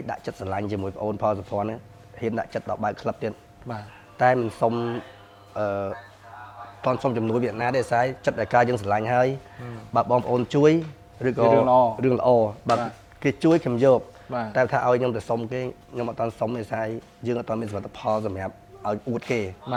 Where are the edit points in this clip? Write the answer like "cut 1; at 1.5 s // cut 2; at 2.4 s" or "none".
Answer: none